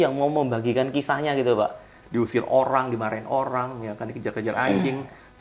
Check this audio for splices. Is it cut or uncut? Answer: cut